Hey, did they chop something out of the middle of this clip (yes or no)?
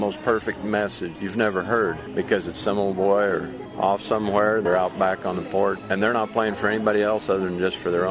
yes